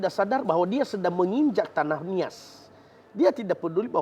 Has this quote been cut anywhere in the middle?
no; 0 cuts

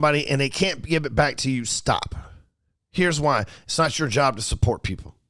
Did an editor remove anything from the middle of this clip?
no; 0 cuts

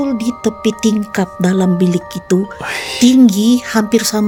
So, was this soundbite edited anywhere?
no; 0 cuts

